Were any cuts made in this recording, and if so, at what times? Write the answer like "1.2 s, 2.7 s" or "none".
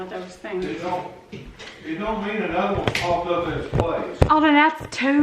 none